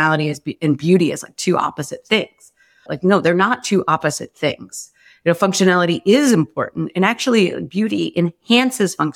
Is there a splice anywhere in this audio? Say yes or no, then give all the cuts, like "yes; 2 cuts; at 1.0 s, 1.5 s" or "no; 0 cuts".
yes; 1 cut; at 2.8 s